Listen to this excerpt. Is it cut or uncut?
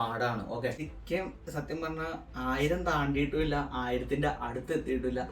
cut